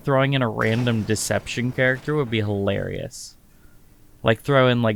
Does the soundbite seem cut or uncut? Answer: uncut